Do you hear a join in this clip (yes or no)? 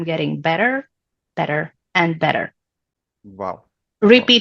no